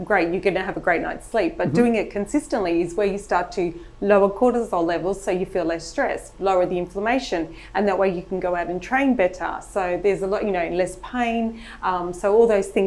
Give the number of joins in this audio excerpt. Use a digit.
0